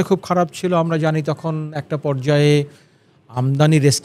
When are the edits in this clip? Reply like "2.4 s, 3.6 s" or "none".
none